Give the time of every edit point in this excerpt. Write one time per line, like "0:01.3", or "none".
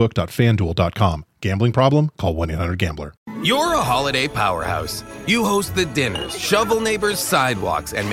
0:03.1